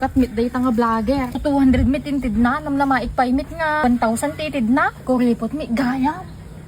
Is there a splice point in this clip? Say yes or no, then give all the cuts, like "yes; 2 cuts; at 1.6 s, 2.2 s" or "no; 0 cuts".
yes; 3 cuts; at 1.4 s, 3.8 s, 4.9 s